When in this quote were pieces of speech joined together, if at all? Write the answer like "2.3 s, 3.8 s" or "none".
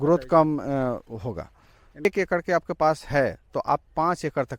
2.1 s